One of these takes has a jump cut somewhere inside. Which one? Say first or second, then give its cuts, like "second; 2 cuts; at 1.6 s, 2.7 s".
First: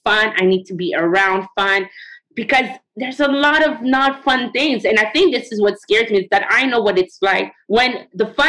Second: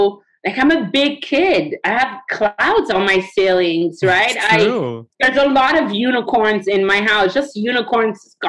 first; 2 cuts; at 2.8 s, 7.8 s